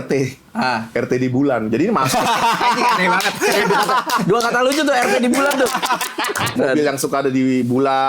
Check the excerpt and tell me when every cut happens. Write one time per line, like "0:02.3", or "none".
0:06.6

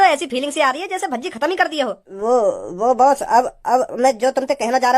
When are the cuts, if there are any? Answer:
0:02.0

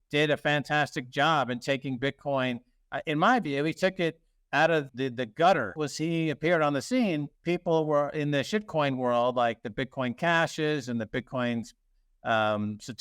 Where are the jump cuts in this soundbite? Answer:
0:04.9
0:05.8

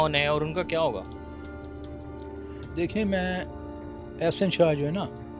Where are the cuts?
none

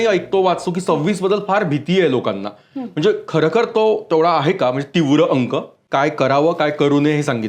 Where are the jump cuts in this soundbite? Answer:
0:05.8

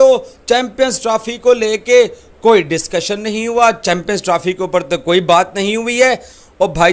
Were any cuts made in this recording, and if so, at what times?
none

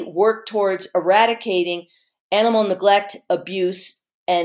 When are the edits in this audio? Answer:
none

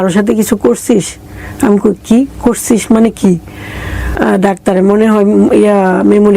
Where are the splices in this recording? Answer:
0:04.1

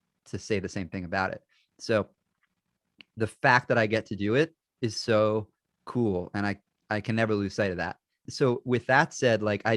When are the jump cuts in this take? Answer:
none

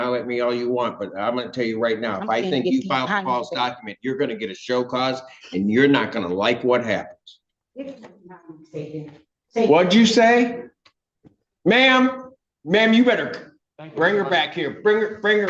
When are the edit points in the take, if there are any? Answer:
0:07.5

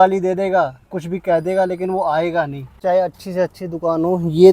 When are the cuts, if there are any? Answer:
0:02.8

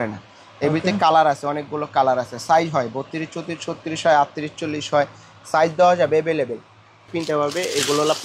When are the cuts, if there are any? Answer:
0:07.1

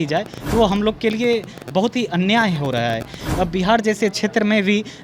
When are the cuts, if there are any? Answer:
0:03.2

